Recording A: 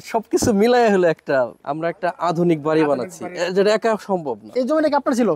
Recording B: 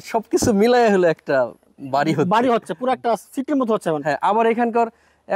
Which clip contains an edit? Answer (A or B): A